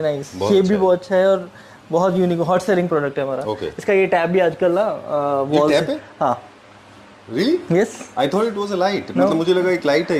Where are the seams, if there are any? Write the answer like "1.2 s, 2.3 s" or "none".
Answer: none